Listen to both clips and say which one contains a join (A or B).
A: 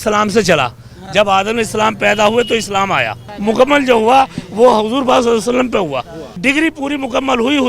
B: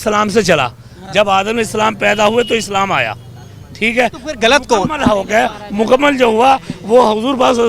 A